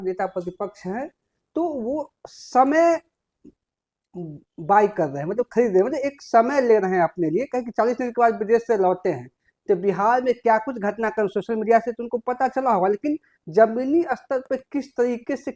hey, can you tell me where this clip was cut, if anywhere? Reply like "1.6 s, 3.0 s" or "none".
none